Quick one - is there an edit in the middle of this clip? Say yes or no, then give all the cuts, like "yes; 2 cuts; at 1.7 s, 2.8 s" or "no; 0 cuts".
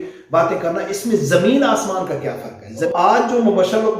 yes; 1 cut; at 2.9 s